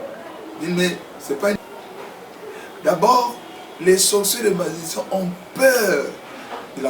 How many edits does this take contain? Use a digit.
1